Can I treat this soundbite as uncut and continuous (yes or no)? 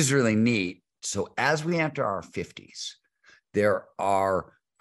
no